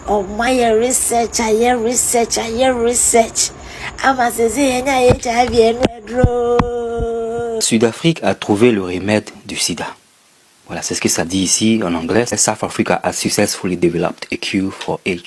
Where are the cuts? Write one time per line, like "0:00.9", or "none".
0:07.6

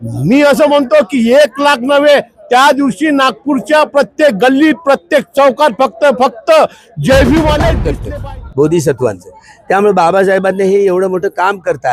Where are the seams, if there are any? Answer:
0:07.9

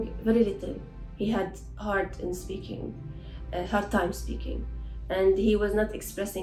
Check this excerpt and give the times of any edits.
none

